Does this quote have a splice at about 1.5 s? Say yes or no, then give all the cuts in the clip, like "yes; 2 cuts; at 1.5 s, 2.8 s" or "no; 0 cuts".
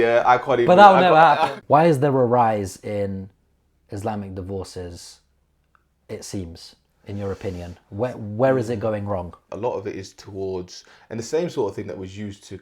yes; 2 cuts; at 1.5 s, 9.4 s